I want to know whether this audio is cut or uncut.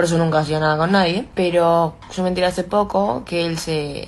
uncut